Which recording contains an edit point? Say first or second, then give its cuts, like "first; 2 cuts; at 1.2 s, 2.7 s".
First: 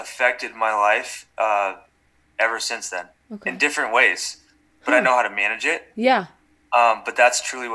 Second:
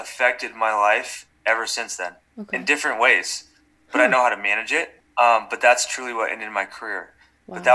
second; 2 cuts; at 1.2 s, 4.9 s